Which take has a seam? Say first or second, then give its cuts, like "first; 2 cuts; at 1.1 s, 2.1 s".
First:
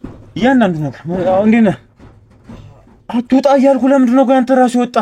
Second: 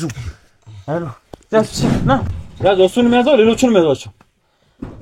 second; 1 cut; at 2.2 s